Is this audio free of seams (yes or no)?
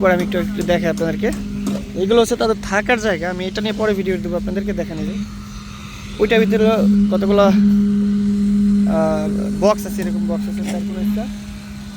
yes